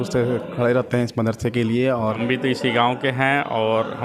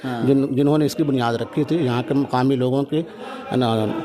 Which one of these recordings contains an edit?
first; 1 cut; at 2.2 s

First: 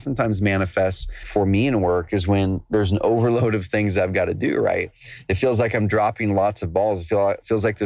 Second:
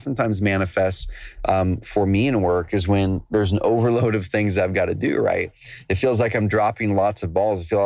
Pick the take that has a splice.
first; 1 cut; at 1.2 s

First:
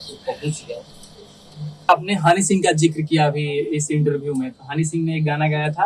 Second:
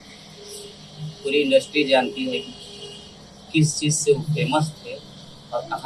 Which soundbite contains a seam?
first; 1 cut; at 1.9 s

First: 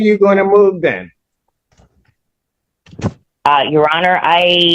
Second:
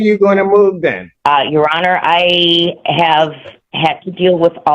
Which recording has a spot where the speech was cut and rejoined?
second; 1 cut; at 1.1 s

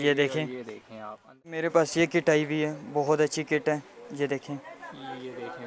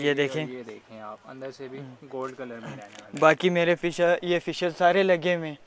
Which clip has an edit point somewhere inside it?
first; 1 cut; at 1.6 s

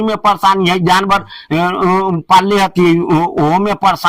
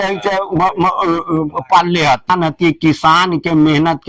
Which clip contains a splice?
second; 1 cut; at 2.3 s

